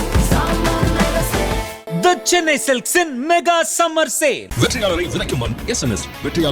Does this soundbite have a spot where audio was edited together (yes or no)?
yes